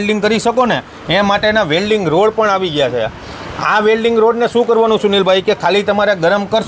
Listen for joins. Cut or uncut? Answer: uncut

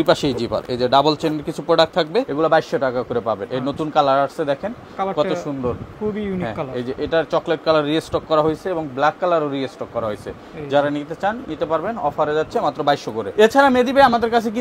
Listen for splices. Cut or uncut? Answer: uncut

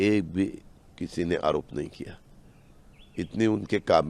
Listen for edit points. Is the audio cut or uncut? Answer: uncut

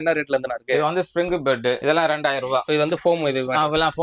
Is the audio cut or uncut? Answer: cut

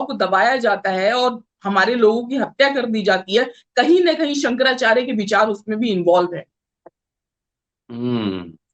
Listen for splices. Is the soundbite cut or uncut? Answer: uncut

